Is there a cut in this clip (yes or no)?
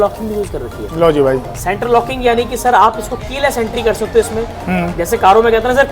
no